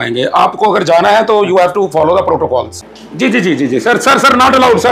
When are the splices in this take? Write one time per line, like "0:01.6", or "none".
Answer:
0:02.8